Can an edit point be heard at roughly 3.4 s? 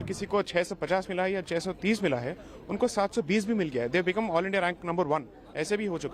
no; 0 cuts

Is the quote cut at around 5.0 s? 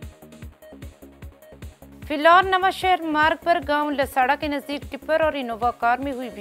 no; 1 cut; at 2.1 s

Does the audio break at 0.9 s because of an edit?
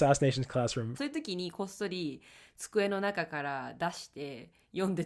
yes; 1 cut; at 0.9 s

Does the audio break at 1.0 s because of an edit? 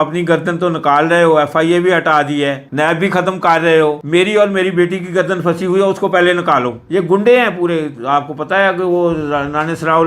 no; 1 cut; at 6.8 s

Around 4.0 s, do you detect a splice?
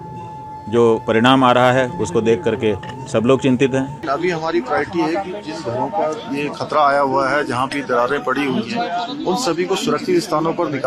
yes; 1 cut; at 4.0 s

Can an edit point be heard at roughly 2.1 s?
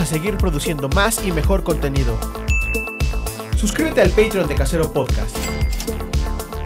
no; 1 cut; at 4.5 s

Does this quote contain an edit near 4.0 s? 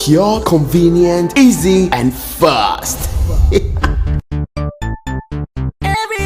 yes; 1 cut; at 4.0 s

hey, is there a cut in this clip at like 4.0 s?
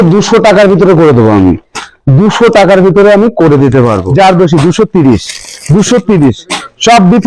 yes; 1 cut; at 4.0 s

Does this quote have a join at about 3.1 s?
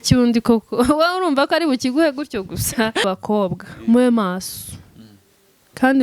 yes; 1 cut; at 3.1 s

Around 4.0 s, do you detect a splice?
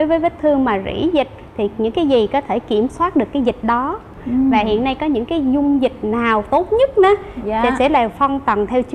yes; 1 cut; at 4.0 s

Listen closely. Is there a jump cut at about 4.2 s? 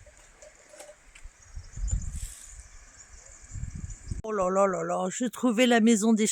yes; 1 cut; at 4.2 s

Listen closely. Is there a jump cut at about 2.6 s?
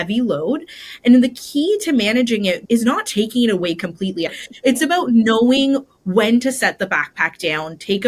yes; 2 cuts; at 2.6 s, 4.4 s

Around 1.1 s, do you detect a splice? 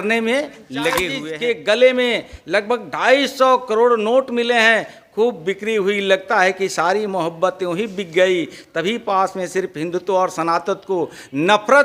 yes; 1 cut; at 1.1 s

